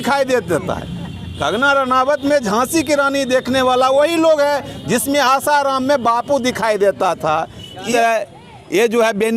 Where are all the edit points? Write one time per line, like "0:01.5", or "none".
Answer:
0:07.9